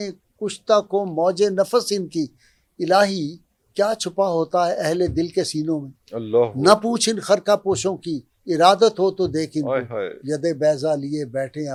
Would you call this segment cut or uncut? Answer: uncut